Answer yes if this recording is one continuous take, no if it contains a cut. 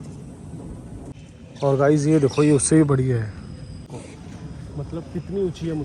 no